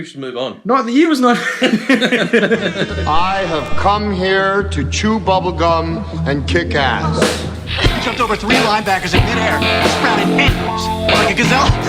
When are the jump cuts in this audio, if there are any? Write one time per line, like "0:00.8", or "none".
0:02.9